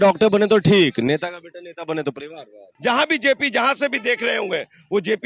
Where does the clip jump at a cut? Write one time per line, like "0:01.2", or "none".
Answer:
0:02.7